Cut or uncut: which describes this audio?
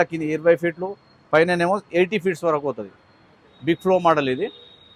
uncut